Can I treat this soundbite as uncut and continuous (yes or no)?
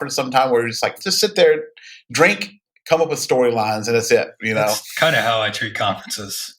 no